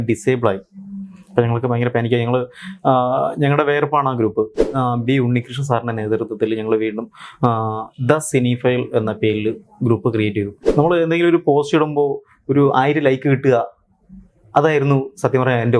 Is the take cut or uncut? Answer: cut